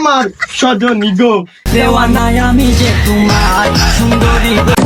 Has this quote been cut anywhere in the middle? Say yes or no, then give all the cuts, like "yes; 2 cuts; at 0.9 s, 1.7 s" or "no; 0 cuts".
no; 0 cuts